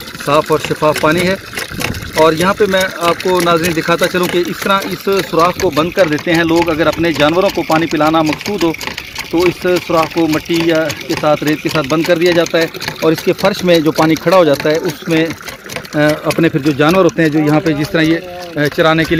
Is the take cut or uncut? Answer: uncut